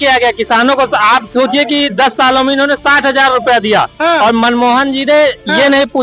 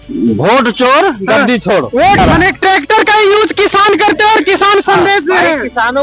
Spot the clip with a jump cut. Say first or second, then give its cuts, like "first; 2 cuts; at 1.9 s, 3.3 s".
second; 1 cut; at 2.2 s